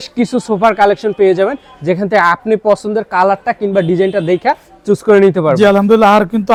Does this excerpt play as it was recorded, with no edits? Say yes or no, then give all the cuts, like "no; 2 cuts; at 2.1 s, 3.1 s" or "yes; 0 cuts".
yes; 0 cuts